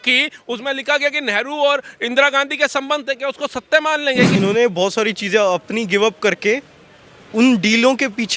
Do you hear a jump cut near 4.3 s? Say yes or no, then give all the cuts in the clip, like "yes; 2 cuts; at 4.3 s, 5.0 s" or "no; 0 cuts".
yes; 1 cut; at 4.3 s